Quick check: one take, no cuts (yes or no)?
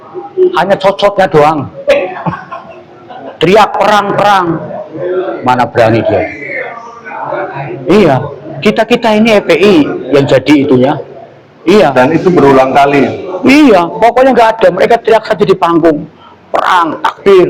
yes